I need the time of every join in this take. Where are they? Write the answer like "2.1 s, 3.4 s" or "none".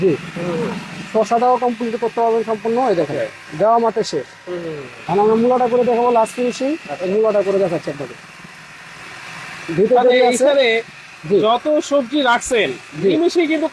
none